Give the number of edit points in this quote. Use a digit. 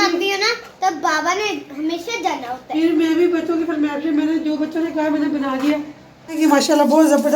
1